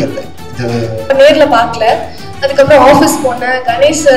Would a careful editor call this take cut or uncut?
cut